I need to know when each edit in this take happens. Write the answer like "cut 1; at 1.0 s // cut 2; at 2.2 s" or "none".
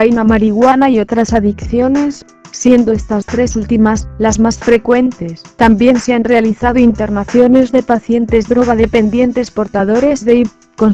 cut 1; at 4.2 s